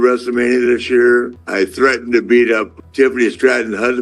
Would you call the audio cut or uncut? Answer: cut